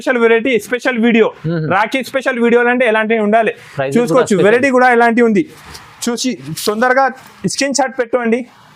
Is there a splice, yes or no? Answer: no